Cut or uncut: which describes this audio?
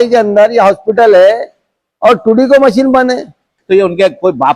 cut